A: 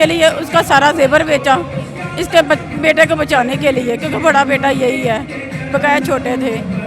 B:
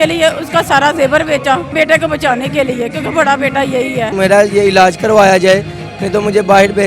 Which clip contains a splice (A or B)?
B